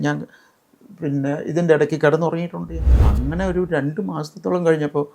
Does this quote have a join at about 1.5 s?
no; 1 cut; at 3.0 s

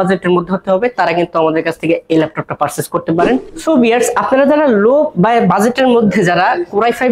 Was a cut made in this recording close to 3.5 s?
yes; 1 cut; at 3.5 s

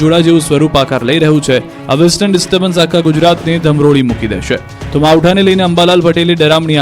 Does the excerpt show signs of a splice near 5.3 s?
yes; 1 cut; at 5.3 s

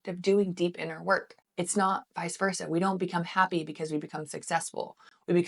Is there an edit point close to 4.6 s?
no; 1 cut; at 1.4 s

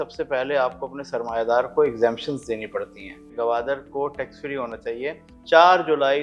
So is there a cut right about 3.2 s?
yes; 2 cuts; at 3.2 s, 5.3 s

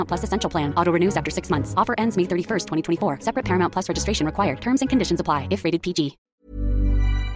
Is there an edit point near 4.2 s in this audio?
no; 1 cut; at 6.2 s

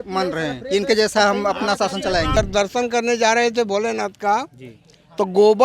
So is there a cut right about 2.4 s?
yes; 1 cut; at 2.4 s

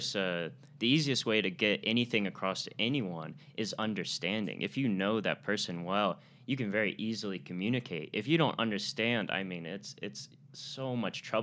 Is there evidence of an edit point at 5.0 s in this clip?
no; 0 cuts

